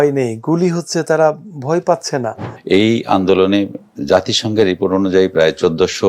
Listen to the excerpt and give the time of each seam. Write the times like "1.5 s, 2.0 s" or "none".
2.5 s